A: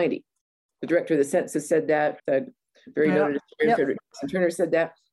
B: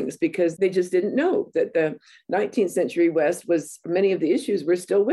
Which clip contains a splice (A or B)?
A